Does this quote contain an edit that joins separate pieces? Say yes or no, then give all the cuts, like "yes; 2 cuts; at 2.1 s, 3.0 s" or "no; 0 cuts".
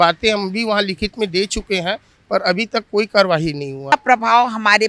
yes; 1 cut; at 3.9 s